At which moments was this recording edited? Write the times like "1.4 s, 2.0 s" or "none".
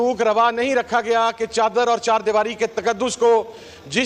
none